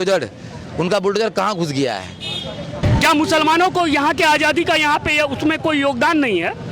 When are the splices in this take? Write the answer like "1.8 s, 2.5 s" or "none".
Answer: 2.8 s